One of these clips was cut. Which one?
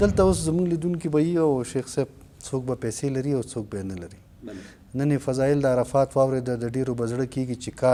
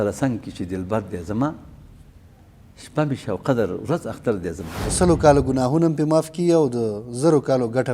second; 1 cut; at 4.7 s

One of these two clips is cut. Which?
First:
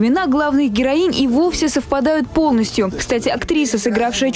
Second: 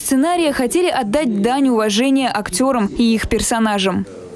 second; 1 cut; at 3.0 s

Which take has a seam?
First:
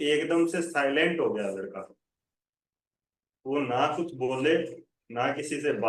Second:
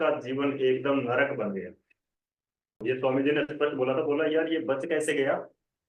second; 1 cut; at 2.7 s

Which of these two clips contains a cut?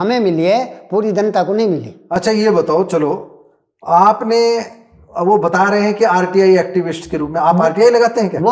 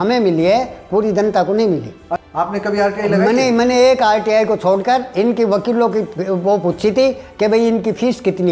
second; 1 cut; at 2.0 s

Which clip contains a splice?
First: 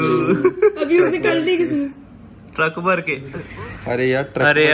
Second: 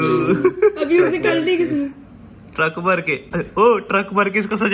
first; 1 cut; at 3.4 s

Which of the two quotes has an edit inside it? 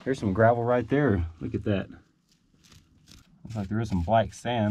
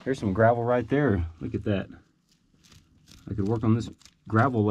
first; 1 cut; at 3.2 s

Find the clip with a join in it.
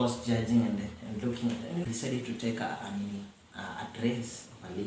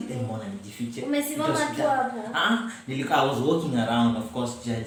first; 1 cut; at 1.8 s

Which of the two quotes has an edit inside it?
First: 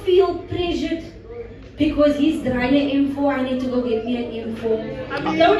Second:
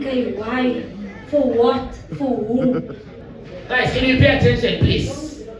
second; 1 cut; at 3.1 s

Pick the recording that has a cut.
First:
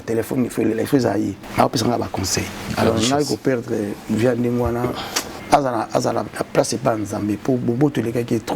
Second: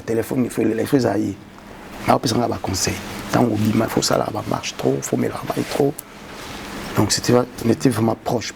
first; 3 cuts; at 1.4 s, 2.7 s, 5.3 s

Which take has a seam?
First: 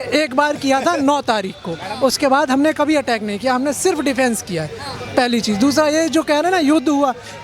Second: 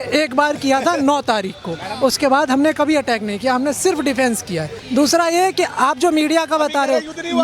second; 1 cut; at 4.7 s

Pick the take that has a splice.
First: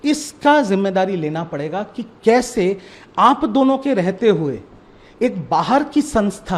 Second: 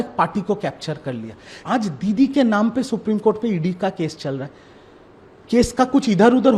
second; 1 cut; at 1.5 s

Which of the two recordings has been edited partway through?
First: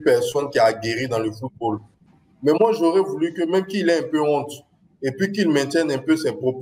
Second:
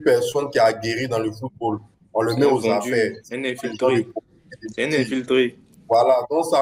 first; 1 cut; at 2.0 s

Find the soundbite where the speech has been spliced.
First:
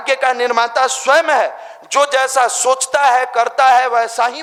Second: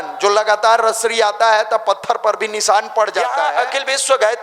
second; 1 cut; at 3.5 s

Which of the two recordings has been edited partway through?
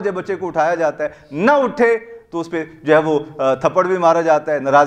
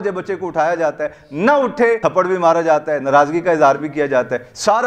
second; 1 cut; at 2.0 s

